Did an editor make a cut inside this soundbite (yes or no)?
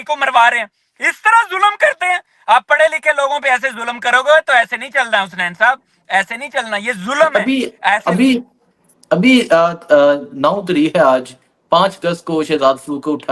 no